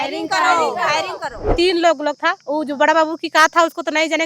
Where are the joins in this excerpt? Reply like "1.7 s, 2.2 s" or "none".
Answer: 1.5 s